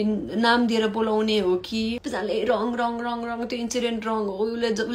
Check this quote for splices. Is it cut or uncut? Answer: cut